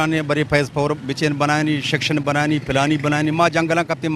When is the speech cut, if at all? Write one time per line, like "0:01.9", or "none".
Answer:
none